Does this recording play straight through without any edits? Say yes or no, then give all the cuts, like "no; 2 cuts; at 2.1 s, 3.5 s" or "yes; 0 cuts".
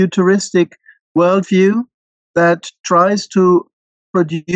no; 1 cut; at 1.0 s